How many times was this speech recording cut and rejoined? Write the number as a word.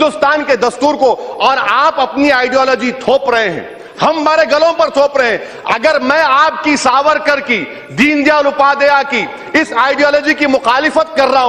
one